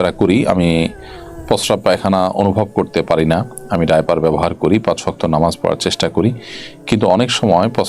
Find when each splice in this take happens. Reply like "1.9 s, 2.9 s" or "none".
none